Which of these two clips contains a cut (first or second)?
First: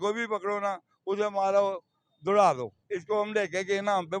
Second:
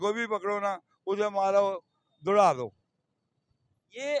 first